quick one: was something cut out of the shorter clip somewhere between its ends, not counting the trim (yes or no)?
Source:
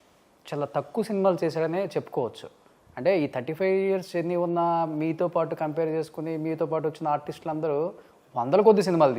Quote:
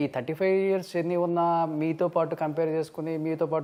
no